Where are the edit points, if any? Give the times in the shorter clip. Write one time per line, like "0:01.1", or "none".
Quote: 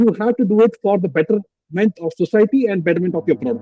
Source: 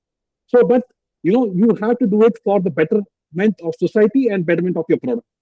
none